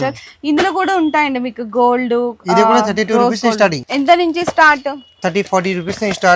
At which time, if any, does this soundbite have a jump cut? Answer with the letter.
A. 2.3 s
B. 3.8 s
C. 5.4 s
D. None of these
B